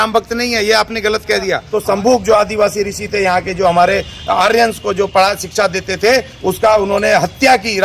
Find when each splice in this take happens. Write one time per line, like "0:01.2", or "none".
0:01.7